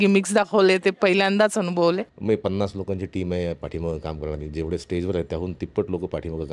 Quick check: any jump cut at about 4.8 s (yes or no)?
no